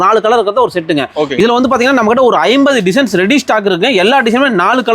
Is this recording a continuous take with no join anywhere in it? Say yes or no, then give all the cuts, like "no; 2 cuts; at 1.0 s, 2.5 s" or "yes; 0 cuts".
no; 1 cut; at 1.4 s